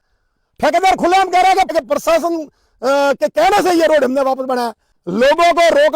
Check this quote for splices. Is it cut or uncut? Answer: cut